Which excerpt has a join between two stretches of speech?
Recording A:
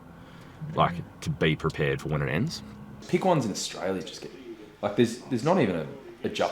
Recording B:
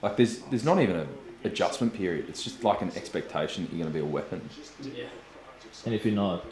A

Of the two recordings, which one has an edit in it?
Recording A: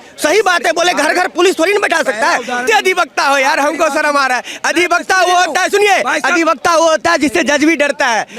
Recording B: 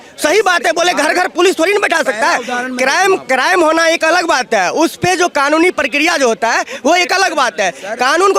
A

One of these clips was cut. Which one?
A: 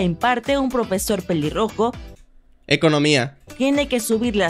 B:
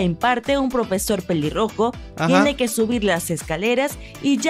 B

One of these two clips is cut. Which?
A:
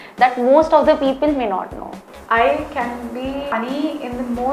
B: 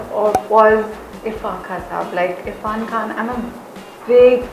A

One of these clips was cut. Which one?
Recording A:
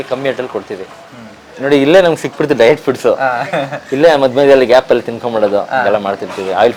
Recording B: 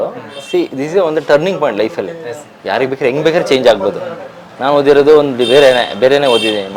A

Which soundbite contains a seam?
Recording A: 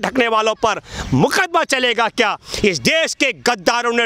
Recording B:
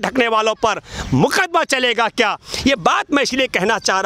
A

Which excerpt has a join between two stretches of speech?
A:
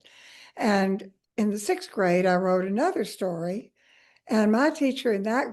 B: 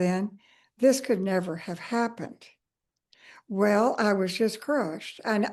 A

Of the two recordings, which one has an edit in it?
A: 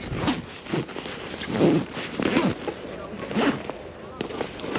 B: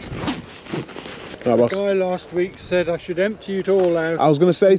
B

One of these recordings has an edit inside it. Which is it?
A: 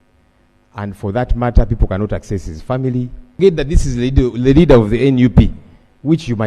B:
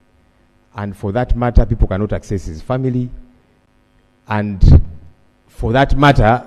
A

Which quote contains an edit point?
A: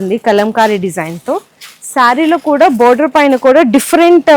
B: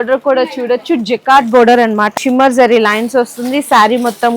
B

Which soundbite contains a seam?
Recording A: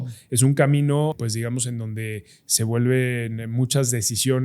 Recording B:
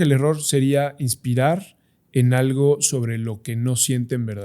A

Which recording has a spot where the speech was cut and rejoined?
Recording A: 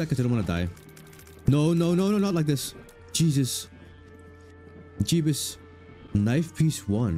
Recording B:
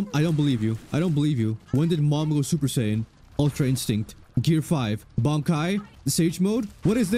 B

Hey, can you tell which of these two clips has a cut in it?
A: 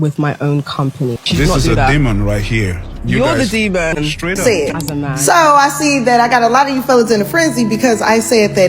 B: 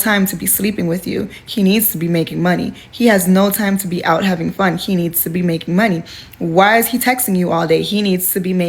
A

